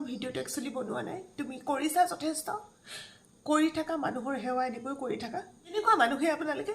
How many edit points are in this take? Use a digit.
1